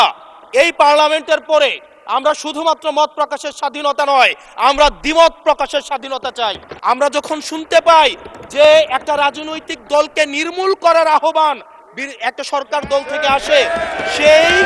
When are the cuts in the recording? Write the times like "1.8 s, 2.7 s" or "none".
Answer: 6.7 s